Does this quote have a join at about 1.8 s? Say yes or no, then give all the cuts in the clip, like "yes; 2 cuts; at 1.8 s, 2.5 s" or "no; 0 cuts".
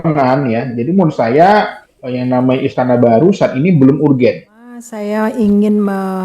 no; 1 cut; at 5.0 s